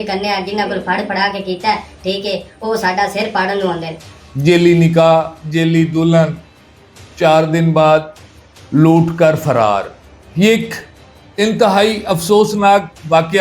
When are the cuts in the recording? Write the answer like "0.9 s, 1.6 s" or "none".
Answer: 4.0 s